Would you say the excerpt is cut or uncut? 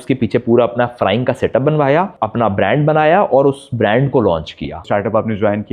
cut